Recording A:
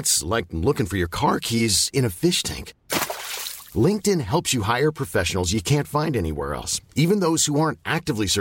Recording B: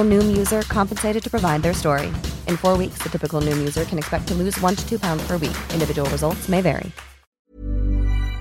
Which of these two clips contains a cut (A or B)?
B